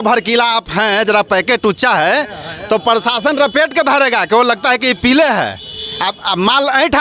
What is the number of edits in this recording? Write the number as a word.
zero